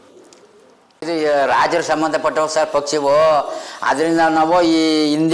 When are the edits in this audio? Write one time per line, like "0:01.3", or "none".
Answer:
0:01.0